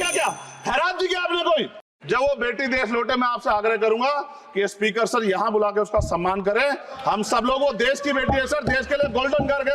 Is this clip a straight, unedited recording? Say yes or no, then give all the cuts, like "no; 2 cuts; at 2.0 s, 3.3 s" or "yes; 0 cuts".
no; 1 cut; at 1.9 s